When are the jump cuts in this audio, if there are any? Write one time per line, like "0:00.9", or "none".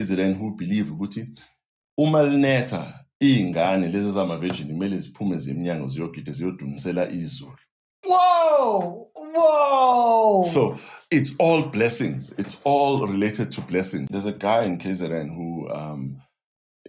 0:14.0

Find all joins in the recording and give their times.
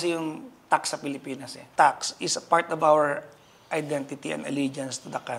0:01.5

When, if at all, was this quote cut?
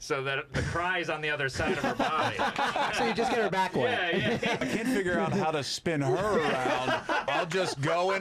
0:02.9
0:04.6
0:07.3

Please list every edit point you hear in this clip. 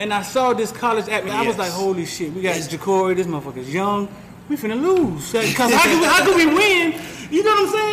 0:01.3

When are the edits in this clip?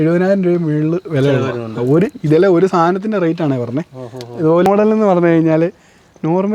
0:04.7

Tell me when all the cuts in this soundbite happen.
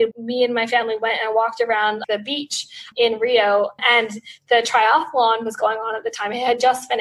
none

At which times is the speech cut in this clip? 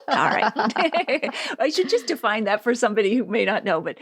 none

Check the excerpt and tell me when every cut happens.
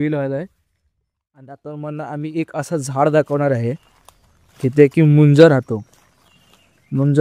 0:01.6

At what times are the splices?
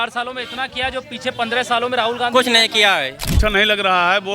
0:03.4

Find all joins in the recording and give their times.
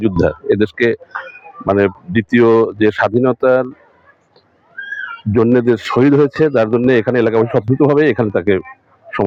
none

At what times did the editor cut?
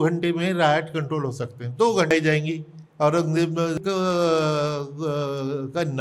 0:02.1
0:03.8

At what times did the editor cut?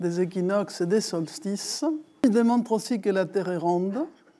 0:02.2

